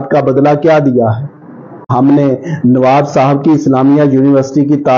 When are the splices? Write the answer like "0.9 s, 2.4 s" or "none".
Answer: 1.9 s